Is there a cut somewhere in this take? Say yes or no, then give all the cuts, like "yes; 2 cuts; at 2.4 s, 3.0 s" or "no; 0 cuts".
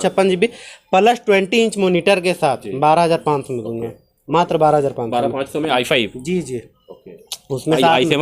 no; 0 cuts